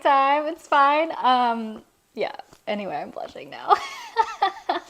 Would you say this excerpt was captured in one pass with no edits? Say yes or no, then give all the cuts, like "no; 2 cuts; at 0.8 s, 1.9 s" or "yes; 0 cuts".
yes; 0 cuts